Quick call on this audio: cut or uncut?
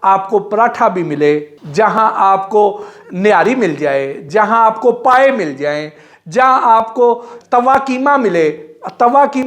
cut